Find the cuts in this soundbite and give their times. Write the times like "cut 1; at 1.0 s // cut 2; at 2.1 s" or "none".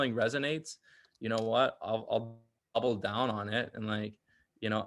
none